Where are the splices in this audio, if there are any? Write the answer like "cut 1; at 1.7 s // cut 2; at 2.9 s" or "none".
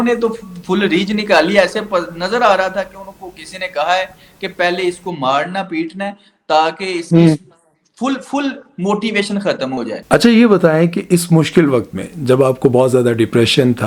cut 1; at 10.1 s